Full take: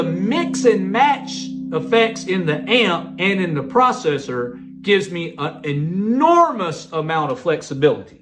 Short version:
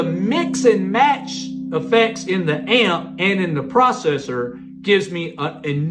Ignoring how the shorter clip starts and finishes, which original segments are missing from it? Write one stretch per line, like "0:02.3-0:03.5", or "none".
none